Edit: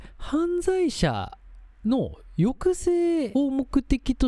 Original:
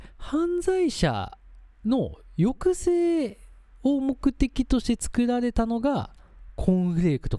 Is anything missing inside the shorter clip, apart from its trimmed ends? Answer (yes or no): yes